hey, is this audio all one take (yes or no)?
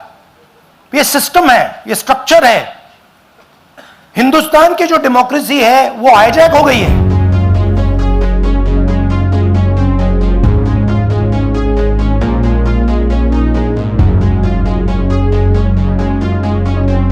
no